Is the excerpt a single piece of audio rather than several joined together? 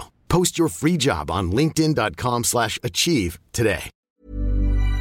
no; 1 cut; at 3.9 s

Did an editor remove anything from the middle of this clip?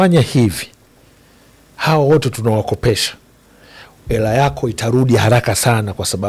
no; 0 cuts

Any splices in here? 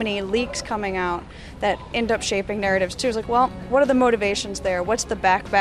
yes; 1 cut; at 3.6 s

